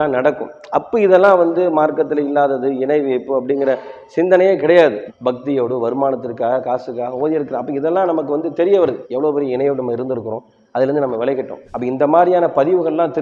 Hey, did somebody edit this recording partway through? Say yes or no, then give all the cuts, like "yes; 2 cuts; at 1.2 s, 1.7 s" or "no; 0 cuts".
yes; 1 cut; at 5.1 s